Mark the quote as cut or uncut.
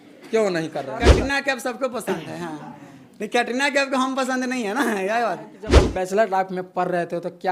cut